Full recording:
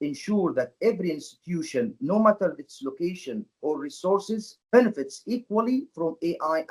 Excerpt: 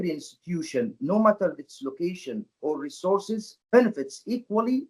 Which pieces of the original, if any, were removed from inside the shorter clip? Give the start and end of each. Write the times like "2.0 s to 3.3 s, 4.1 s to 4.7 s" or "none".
none